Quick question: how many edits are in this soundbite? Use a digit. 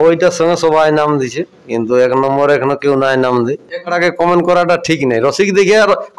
1